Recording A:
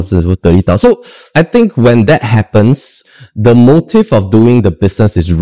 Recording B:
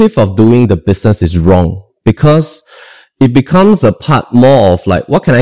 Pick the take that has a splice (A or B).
A